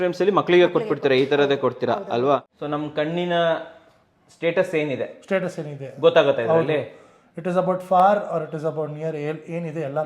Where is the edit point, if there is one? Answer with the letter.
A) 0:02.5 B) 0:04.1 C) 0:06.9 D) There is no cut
A